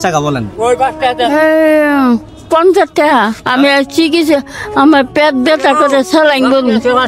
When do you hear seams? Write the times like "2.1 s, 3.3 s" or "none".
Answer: none